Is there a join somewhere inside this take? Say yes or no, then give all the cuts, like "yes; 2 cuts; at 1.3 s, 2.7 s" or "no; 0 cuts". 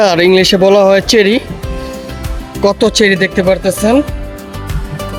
no; 0 cuts